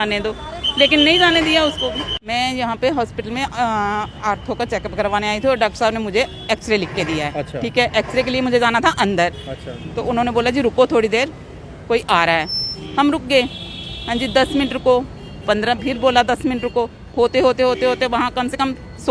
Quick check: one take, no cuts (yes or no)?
no